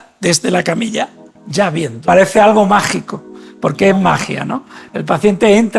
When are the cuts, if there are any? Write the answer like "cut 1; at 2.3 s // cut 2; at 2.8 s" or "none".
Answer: cut 1; at 1.9 s